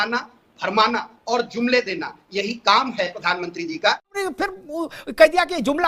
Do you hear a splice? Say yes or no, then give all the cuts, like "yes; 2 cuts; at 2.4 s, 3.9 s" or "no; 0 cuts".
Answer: yes; 1 cut; at 4.1 s